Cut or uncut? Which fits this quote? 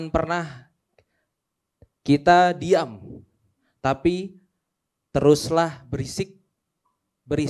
uncut